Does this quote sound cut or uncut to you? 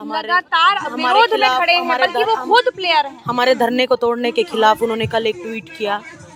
uncut